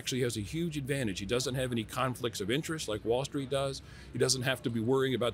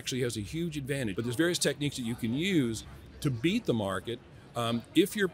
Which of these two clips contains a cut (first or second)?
second